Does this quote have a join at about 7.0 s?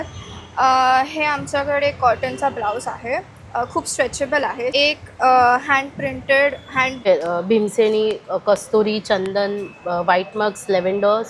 yes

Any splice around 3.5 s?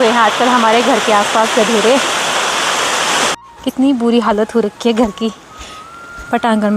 yes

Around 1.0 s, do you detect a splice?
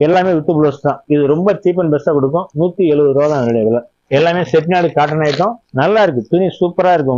yes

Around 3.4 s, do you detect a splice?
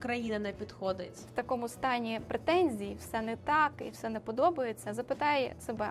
no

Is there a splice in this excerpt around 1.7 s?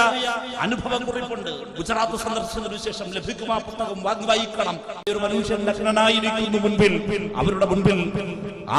no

